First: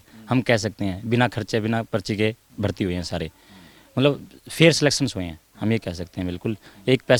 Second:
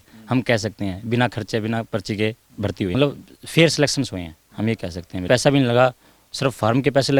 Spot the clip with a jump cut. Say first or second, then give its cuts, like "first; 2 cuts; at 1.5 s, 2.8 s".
second; 2 cuts; at 2.9 s, 5.2 s